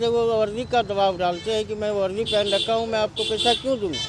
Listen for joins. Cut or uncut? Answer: uncut